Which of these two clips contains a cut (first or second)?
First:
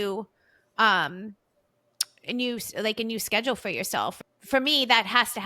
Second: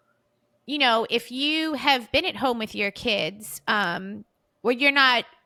first